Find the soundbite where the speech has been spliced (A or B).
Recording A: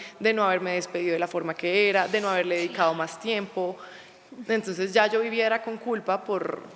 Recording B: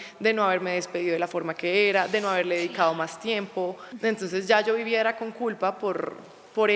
B